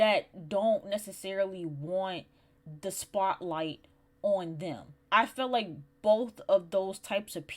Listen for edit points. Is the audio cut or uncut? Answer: cut